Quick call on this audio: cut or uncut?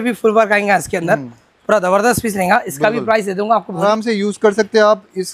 cut